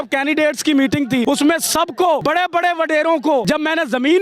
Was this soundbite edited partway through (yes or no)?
yes